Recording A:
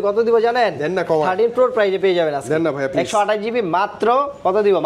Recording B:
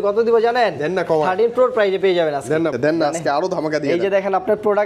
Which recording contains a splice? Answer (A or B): B